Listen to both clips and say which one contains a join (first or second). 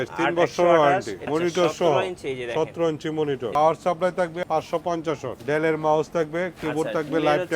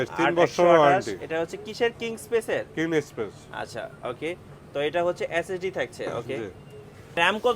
first